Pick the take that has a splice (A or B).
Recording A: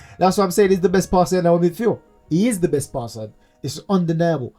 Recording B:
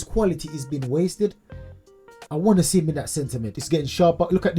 B